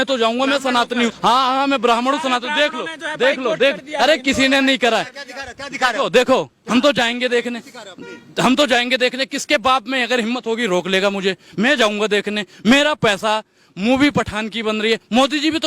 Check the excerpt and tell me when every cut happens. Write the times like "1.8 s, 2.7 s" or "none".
1.2 s